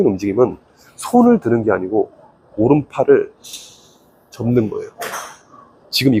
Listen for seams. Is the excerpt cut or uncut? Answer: uncut